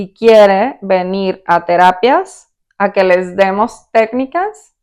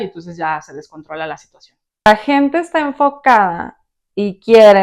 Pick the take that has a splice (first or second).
second